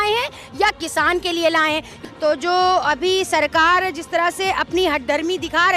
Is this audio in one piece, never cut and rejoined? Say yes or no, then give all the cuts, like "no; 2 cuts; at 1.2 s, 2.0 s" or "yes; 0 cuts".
no; 1 cut; at 2.0 s